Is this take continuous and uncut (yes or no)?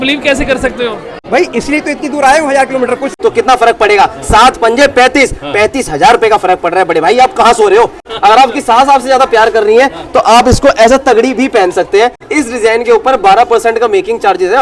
no